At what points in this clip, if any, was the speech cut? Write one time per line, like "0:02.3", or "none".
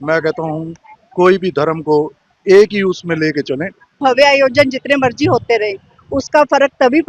0:03.9